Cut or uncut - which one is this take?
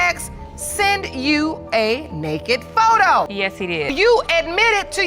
cut